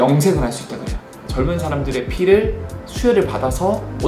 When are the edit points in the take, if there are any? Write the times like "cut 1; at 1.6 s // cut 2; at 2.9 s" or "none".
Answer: cut 1; at 1.1 s